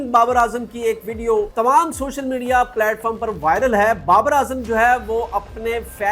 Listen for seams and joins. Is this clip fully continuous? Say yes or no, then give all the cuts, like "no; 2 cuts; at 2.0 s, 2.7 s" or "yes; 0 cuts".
no; 1 cut; at 1.5 s